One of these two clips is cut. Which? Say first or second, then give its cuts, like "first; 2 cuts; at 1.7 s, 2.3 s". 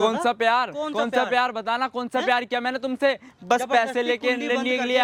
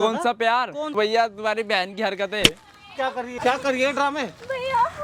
second; 2 cuts; at 0.9 s, 3.3 s